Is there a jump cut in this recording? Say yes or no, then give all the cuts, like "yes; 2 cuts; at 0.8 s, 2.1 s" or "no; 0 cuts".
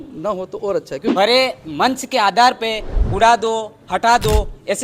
yes; 1 cut; at 1.0 s